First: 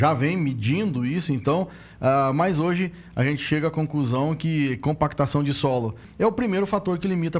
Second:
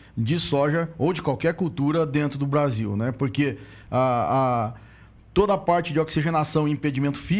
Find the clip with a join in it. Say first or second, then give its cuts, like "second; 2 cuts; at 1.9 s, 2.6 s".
first; 1 cut; at 6.0 s